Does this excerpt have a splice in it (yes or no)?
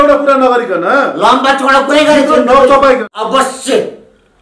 yes